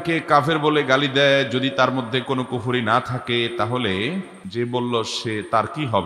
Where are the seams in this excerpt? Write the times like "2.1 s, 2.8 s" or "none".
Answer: 4.4 s